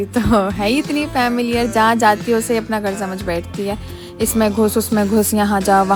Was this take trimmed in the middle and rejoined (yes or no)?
no